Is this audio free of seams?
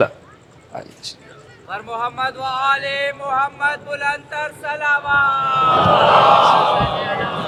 yes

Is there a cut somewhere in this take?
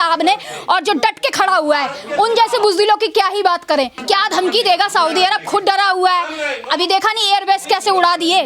yes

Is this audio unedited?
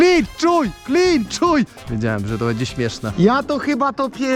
yes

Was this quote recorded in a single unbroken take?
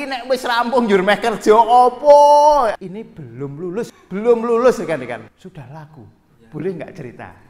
no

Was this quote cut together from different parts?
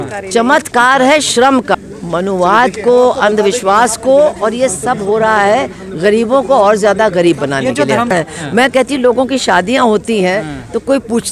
yes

